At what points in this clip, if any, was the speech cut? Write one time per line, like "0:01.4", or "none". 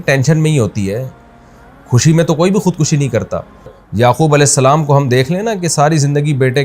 0:03.8